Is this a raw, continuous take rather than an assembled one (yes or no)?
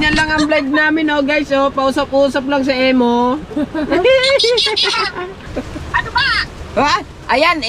no